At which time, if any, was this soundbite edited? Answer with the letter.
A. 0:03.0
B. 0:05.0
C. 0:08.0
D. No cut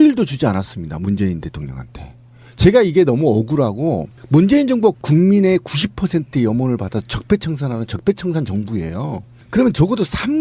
C